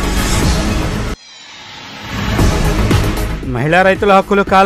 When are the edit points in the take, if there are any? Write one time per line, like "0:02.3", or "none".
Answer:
0:01.3
0:03.1